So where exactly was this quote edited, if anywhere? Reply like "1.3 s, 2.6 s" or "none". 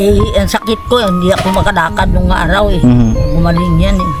none